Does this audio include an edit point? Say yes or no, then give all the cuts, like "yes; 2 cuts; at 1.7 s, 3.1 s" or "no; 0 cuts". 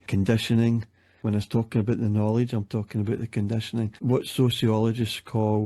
yes; 1 cut; at 1.2 s